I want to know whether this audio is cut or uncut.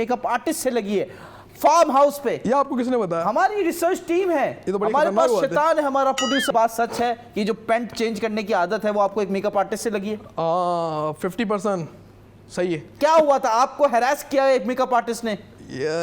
cut